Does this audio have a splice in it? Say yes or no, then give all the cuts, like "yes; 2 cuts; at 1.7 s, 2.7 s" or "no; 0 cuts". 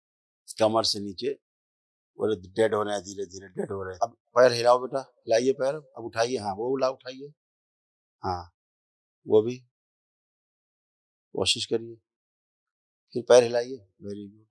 yes; 1 cut; at 3.9 s